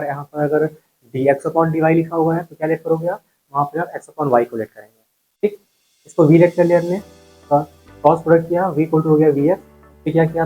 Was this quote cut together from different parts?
no; 0 cuts

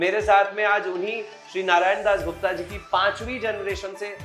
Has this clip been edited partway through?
no; 0 cuts

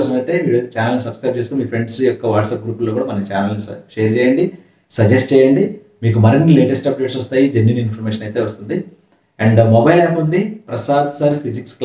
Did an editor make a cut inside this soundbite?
no; 0 cuts

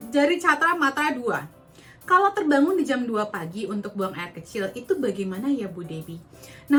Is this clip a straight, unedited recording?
yes; 0 cuts

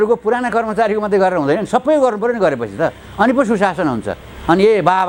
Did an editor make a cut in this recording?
no; 0 cuts

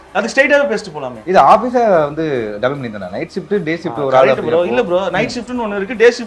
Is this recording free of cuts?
yes; 0 cuts

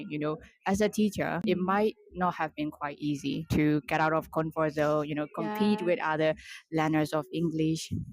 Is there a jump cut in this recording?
yes; 1 cut; at 1.4 s

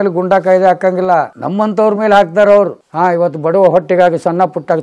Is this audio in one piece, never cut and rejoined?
no; 2 cuts; at 1.4 s, 2.8 s

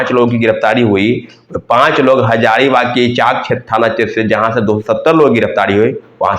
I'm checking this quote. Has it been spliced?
no; 0 cuts

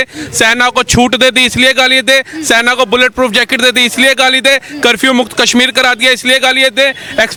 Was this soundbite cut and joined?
no; 0 cuts

